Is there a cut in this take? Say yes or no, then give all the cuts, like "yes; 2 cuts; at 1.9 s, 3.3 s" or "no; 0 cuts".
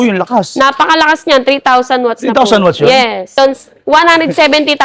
yes; 1 cut; at 3.4 s